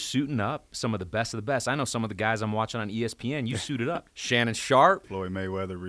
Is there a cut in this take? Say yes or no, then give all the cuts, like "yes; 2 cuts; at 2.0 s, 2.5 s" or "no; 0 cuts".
yes; 2 cuts; at 4.1 s, 5.1 s